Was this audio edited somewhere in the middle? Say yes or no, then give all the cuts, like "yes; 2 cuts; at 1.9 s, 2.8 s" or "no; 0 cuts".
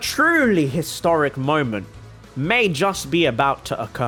no; 0 cuts